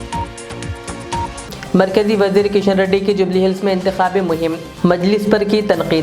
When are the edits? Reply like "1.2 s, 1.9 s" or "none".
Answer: 1.0 s